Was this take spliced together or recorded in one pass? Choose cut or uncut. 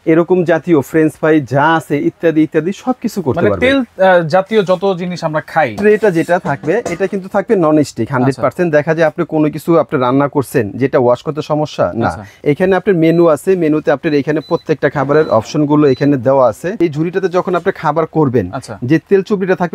cut